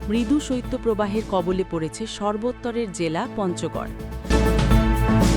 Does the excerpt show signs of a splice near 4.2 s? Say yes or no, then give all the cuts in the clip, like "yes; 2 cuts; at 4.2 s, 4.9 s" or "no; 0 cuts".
yes; 1 cut; at 4.2 s